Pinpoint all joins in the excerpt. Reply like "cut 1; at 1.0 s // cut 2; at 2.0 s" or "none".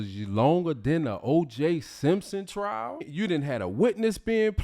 cut 1; at 3.0 s